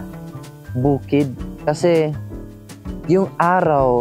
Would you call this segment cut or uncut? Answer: cut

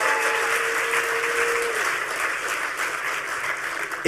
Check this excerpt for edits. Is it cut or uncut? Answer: uncut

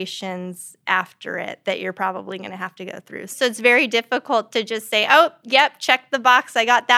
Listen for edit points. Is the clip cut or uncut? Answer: cut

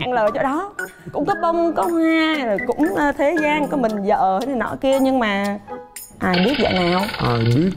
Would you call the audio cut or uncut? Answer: uncut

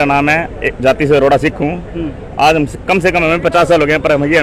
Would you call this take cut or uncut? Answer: uncut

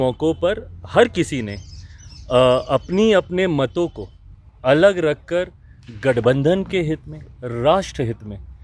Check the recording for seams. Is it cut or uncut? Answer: uncut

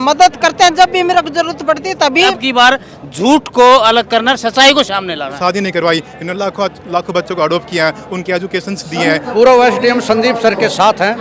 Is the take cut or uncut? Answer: cut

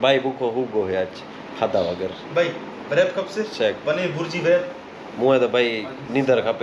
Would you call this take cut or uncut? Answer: uncut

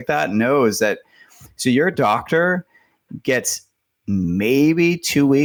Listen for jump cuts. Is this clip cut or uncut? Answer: uncut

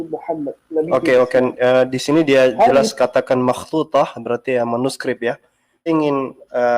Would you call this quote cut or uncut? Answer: cut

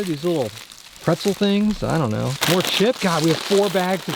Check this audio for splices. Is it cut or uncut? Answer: cut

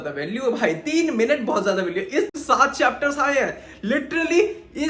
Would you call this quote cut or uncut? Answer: cut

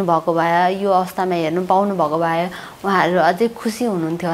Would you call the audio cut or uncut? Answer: uncut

